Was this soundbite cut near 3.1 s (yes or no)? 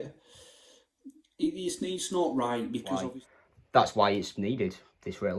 yes